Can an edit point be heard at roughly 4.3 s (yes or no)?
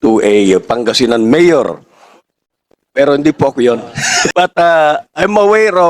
yes